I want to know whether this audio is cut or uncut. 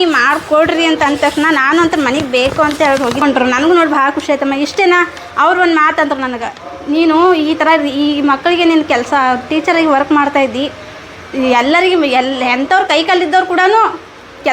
cut